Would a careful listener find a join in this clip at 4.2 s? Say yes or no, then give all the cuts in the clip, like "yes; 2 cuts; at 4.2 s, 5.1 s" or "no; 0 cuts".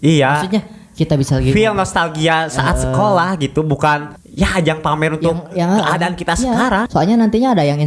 yes; 2 cuts; at 4.2 s, 6.9 s